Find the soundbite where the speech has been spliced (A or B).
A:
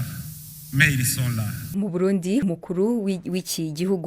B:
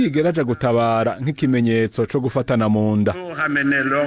A